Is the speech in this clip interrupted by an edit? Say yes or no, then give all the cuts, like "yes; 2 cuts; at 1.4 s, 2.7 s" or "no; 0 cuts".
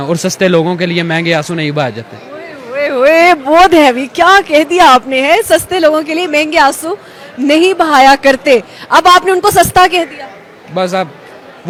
no; 0 cuts